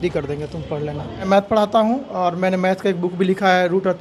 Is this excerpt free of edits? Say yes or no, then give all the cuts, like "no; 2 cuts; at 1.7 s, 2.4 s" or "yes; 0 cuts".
no; 1 cut; at 1.3 s